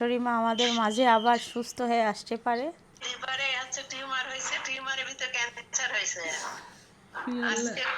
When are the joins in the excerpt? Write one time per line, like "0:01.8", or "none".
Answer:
0:03.0